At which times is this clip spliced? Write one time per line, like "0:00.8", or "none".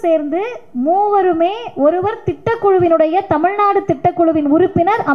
none